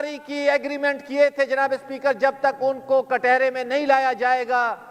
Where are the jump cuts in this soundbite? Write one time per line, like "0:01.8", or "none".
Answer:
none